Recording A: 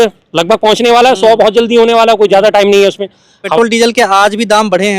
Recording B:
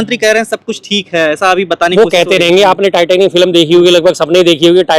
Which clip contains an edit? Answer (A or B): A